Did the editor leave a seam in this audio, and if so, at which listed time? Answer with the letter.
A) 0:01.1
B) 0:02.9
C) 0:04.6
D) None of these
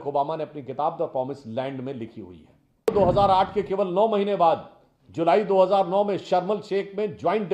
B